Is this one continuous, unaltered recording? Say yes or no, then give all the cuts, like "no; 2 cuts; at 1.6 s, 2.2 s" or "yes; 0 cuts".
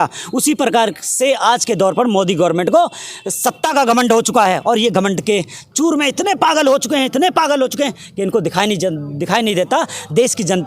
yes; 0 cuts